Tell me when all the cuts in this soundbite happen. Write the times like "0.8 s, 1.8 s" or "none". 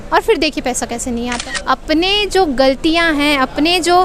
1.5 s

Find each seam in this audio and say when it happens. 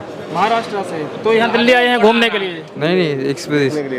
none

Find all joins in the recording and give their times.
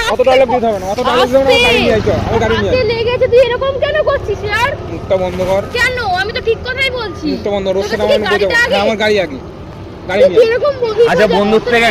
10.9 s

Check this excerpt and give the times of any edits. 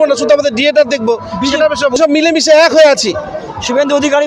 1.9 s

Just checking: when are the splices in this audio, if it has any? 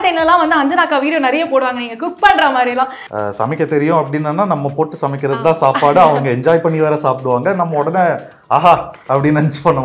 3.0 s

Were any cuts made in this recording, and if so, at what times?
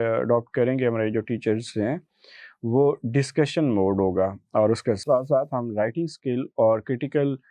5.0 s

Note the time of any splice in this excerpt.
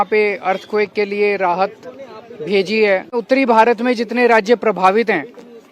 3.2 s

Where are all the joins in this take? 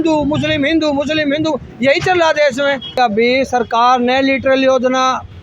3.0 s

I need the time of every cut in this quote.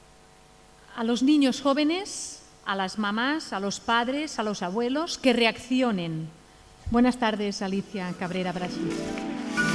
4.8 s

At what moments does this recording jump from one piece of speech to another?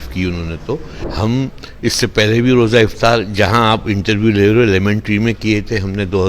1.0 s

